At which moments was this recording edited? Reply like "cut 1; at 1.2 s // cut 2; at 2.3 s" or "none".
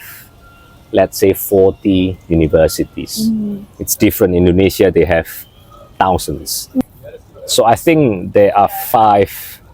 cut 1; at 6.8 s